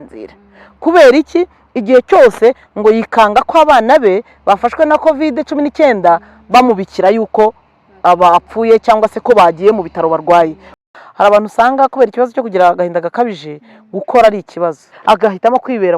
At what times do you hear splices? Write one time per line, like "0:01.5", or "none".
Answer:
0:10.8
0:14.9